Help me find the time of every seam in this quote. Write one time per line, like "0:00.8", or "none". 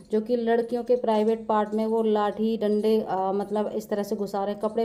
none